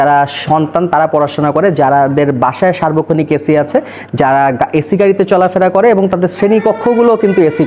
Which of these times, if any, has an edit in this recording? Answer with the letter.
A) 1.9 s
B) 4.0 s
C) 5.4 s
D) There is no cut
D